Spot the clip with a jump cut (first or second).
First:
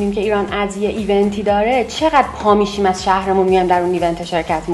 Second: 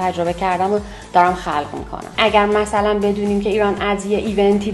second